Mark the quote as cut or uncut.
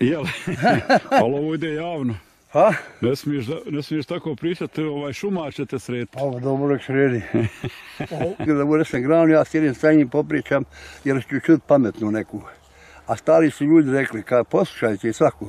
cut